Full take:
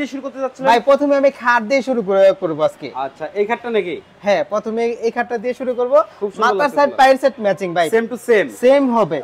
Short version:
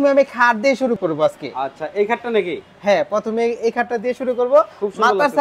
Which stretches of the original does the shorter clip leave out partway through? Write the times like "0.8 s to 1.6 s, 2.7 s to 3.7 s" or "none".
2.0 s to 2.4 s